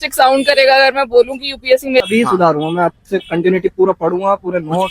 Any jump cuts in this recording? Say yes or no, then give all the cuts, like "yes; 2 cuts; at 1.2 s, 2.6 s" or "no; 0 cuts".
yes; 1 cut; at 2.0 s